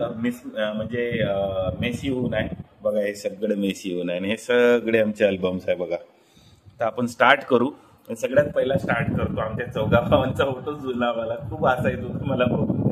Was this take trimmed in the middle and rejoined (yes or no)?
no